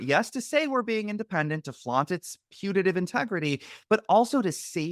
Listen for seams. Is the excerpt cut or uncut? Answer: uncut